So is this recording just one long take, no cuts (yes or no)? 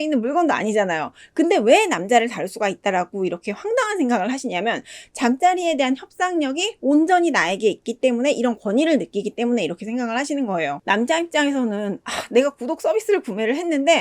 no